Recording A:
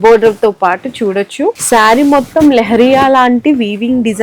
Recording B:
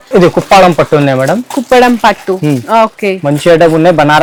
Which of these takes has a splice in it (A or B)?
A